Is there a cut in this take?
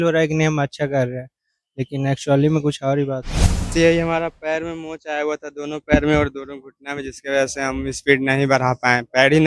yes; 1 cut; at 3.7 s

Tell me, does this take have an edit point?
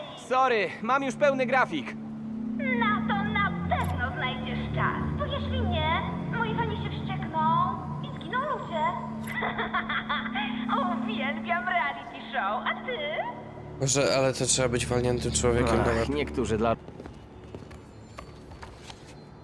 yes; 1 cut; at 16.7 s

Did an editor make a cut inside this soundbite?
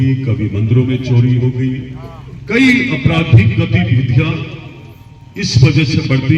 no; 0 cuts

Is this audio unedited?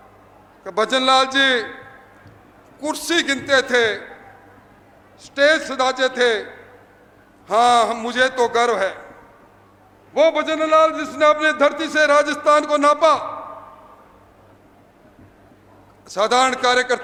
yes; 0 cuts

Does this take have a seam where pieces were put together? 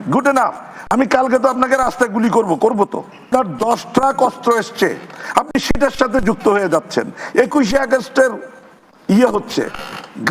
yes; 1 cut; at 3.2 s

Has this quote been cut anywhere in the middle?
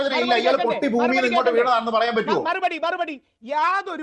yes; 1 cut; at 2.4 s

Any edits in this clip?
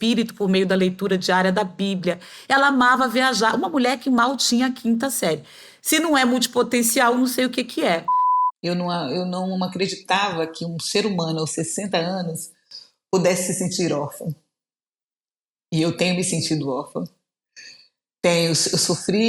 yes; 1 cut; at 8.2 s

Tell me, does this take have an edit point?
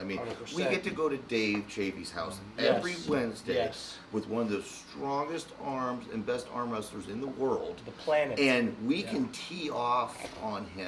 no; 0 cuts

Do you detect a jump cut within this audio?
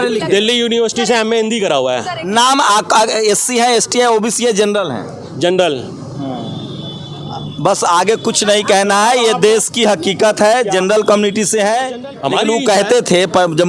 yes; 1 cut; at 12.0 s

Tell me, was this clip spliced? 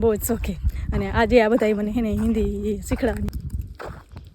yes; 1 cut; at 3.3 s

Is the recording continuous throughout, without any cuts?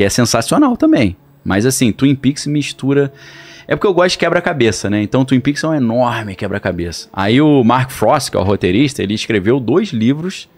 yes; 0 cuts

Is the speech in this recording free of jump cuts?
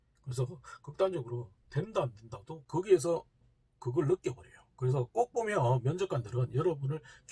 no; 1 cut; at 2.6 s

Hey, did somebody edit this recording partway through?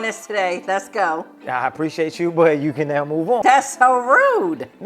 yes; 1 cut; at 3.4 s

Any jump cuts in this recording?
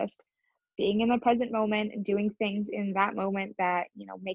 no; 0 cuts

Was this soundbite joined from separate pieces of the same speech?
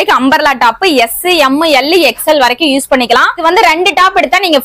yes; 1 cut; at 3.4 s

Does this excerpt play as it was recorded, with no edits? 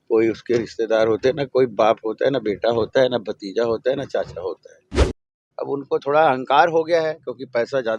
no; 1 cut; at 4.8 s

